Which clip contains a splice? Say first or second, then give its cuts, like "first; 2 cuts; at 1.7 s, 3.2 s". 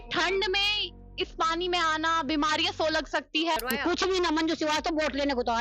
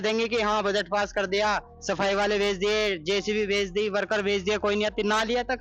first; 1 cut; at 3.6 s